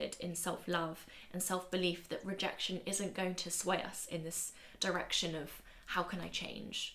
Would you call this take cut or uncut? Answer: uncut